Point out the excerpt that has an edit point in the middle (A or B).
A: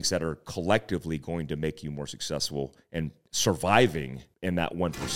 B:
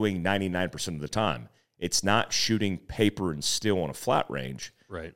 A